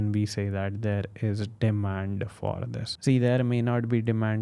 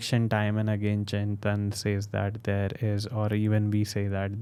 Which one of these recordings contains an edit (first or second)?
first